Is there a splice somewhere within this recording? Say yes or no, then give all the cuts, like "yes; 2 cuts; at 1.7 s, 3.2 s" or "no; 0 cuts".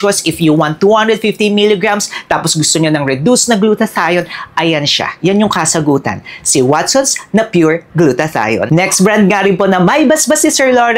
no; 0 cuts